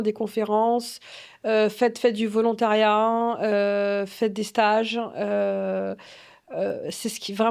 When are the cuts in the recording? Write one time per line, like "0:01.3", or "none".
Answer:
none